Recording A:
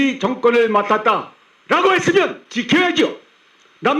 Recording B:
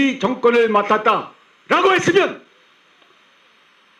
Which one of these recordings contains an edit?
A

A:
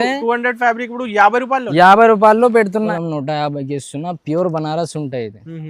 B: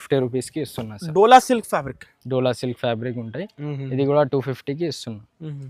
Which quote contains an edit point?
A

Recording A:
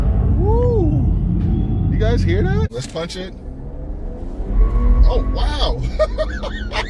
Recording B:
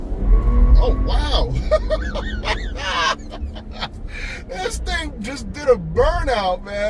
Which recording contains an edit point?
A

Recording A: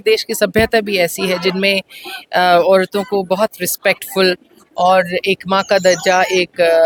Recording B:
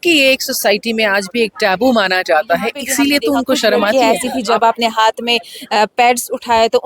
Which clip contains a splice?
B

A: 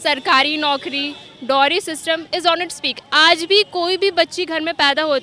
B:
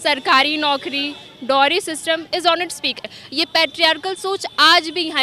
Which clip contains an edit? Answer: B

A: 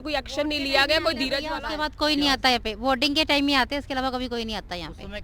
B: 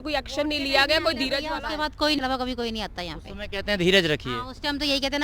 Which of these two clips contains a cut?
B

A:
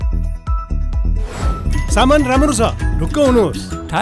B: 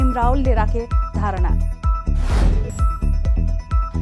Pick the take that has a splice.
A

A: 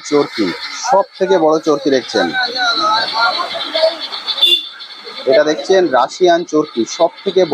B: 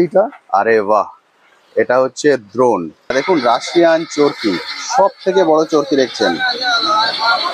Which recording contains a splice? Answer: B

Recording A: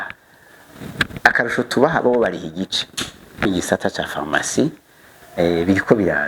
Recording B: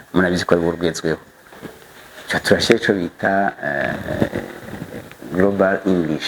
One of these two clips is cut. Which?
A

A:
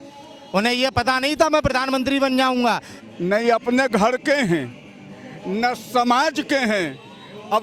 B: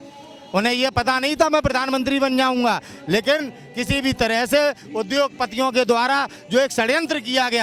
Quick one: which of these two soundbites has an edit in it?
A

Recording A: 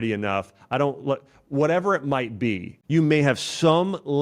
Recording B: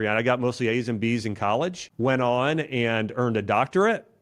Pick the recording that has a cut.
B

